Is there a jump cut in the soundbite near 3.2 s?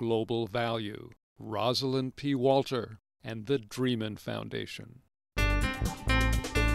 no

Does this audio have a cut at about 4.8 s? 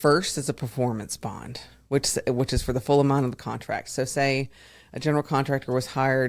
no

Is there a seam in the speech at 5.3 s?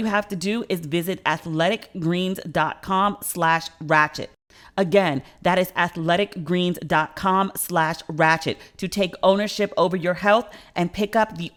no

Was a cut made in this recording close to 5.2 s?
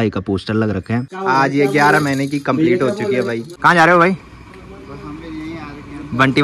no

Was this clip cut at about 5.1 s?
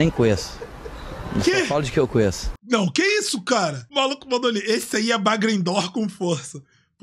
no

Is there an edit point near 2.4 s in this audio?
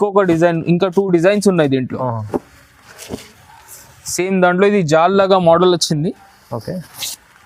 no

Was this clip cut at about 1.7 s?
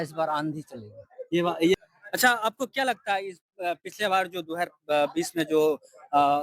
yes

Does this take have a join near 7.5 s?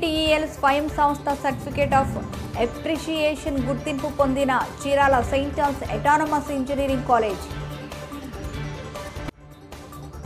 no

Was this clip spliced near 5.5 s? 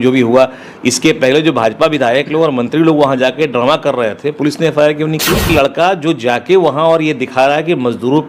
yes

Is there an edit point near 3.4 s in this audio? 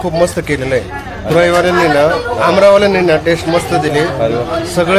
no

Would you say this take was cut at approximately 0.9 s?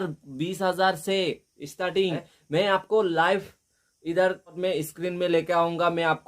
no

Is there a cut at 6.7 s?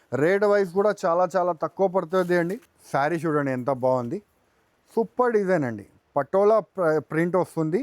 no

